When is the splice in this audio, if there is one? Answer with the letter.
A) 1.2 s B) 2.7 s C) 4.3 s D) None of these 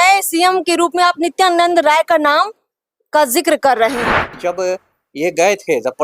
C